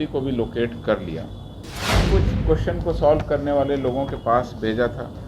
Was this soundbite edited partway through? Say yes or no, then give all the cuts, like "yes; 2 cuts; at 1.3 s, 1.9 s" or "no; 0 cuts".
yes; 1 cut; at 2.1 s